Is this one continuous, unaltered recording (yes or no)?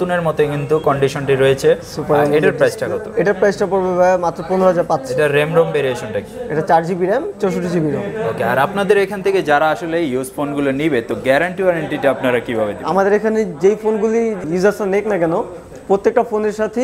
yes